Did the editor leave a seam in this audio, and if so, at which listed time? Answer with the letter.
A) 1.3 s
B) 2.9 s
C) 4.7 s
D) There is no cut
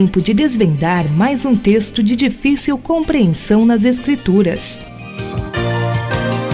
C